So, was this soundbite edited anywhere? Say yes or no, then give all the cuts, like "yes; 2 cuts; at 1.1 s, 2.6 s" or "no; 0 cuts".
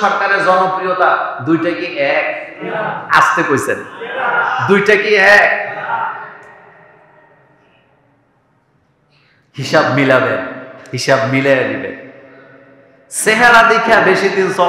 no; 0 cuts